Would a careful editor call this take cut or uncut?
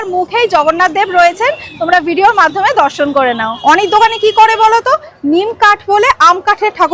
cut